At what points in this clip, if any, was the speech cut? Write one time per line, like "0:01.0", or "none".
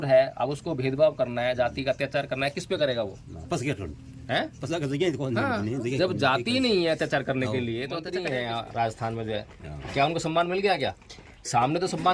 0:08.0